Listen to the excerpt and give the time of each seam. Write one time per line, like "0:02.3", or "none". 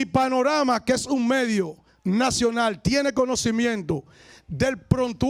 none